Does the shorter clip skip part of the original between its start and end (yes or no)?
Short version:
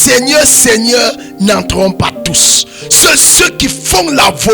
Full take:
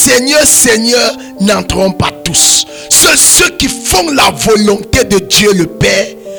no